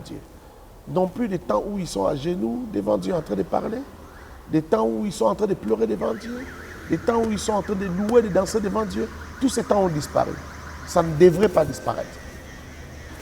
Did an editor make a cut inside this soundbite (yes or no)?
no